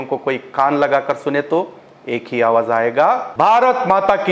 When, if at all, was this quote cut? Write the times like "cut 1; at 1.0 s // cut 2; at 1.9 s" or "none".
cut 1; at 3.3 s